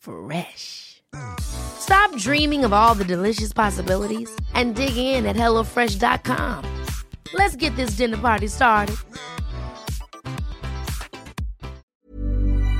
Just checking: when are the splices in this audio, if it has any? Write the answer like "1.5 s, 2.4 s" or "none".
11.9 s